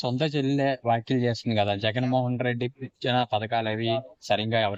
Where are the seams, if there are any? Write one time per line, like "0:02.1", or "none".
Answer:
none